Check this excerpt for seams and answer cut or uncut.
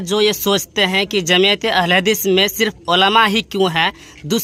uncut